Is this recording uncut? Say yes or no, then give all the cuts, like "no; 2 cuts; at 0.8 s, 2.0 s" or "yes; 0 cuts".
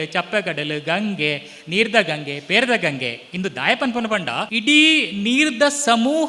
no; 1 cut; at 4.5 s